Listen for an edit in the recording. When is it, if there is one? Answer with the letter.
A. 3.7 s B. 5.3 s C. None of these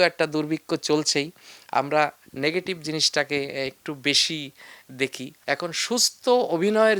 B